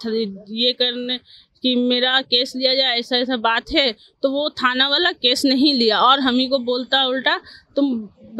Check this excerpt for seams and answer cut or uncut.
uncut